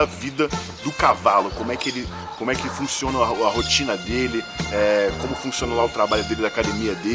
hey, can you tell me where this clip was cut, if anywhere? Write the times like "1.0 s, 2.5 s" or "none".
none